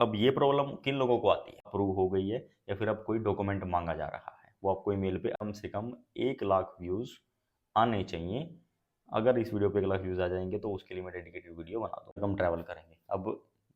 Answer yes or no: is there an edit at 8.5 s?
no